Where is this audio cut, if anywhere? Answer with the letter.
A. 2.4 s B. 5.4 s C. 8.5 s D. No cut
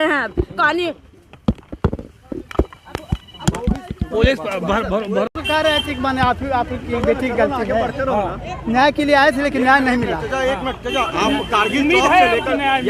B